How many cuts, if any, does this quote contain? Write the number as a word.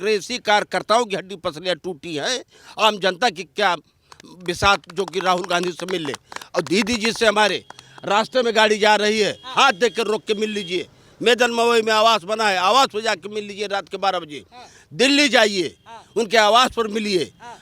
zero